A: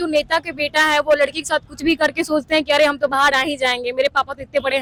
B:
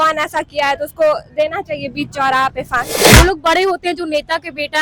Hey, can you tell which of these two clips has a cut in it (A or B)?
B